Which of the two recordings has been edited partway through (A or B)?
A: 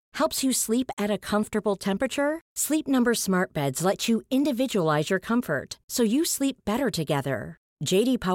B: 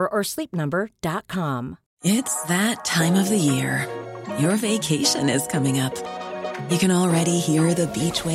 B